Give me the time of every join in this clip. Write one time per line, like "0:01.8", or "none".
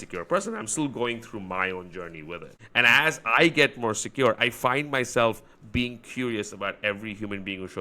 0:02.5